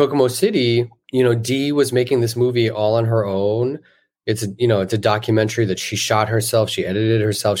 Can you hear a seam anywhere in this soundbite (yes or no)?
yes